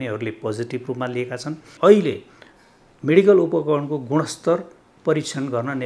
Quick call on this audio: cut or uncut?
cut